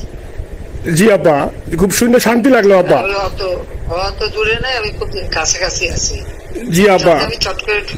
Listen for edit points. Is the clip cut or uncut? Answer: uncut